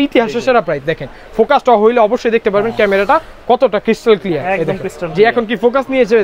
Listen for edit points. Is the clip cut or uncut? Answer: uncut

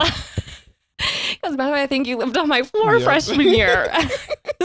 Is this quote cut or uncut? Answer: cut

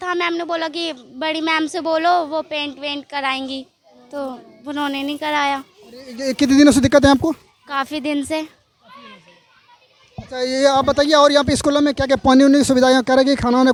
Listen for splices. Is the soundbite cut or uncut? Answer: uncut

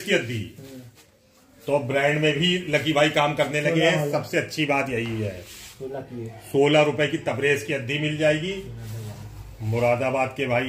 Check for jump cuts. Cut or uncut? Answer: uncut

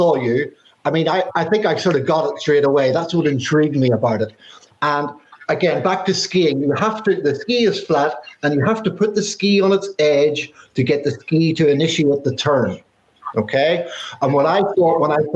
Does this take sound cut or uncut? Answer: cut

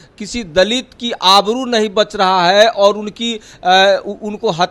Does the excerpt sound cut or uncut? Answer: uncut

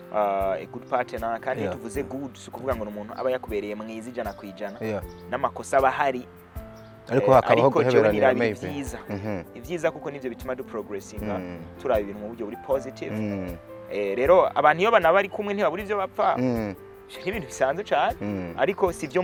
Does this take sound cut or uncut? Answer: uncut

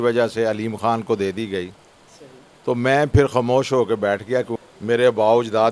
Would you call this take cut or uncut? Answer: cut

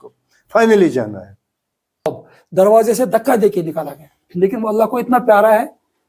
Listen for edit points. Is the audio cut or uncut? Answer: cut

